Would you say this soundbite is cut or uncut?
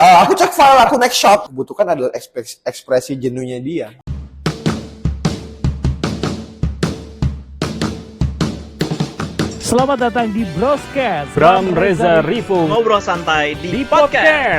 cut